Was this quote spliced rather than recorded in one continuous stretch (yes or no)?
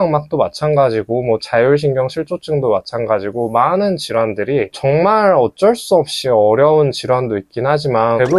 no